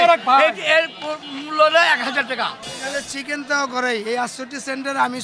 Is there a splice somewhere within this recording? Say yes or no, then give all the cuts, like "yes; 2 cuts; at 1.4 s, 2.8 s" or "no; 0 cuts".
yes; 1 cut; at 2.8 s